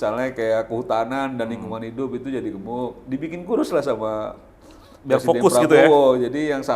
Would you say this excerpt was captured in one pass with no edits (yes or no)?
yes